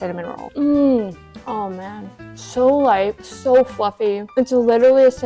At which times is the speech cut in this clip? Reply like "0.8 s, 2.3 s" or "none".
2.2 s